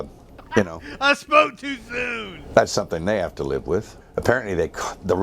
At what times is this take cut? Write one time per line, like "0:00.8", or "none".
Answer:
0:04.0